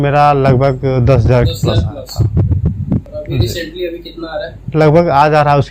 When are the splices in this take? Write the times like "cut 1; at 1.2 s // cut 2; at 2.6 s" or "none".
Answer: cut 1; at 3.1 s // cut 2; at 4.6 s